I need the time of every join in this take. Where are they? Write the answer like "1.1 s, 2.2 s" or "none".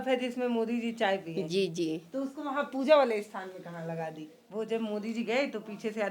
4.4 s